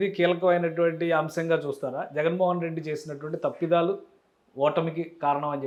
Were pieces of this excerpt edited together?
no; 0 cuts

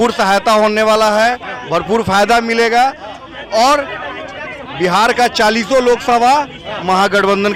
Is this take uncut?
yes; 0 cuts

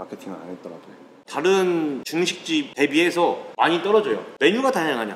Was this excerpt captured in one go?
no; 4 cuts; at 1.1 s, 2.3 s, 3.5 s, 4.3 s

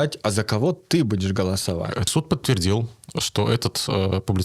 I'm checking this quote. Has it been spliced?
yes; 1 cut; at 2.1 s

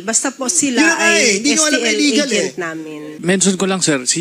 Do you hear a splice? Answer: yes; 1 cut; at 3.1 s

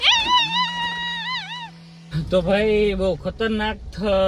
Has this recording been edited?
yes; 1 cut; at 2.1 s

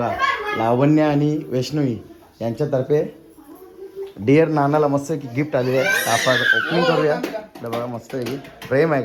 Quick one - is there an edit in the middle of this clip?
no; 0 cuts

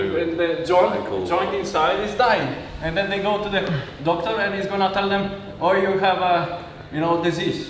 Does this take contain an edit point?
no; 0 cuts

